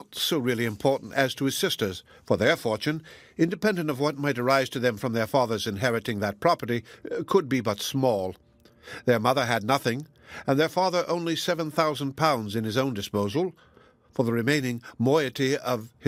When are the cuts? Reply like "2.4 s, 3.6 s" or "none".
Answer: none